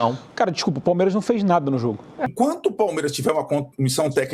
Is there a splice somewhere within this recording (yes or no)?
yes